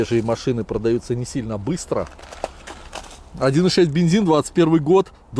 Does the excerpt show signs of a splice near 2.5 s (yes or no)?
no